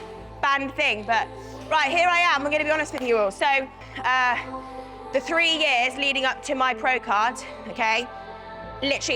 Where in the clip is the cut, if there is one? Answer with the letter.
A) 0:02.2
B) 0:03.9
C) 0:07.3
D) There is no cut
B